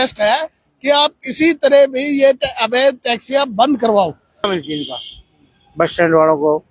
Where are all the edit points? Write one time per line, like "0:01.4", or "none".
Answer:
0:04.5